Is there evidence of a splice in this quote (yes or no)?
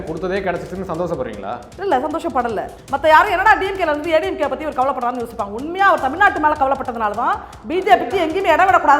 yes